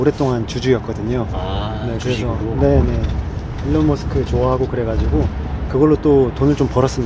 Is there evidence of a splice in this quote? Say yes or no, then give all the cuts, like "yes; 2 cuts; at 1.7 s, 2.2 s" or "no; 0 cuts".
no; 0 cuts